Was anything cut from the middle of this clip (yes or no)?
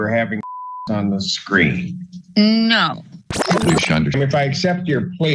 yes